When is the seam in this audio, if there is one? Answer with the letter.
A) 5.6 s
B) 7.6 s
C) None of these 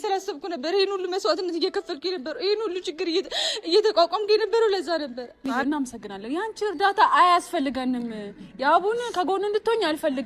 A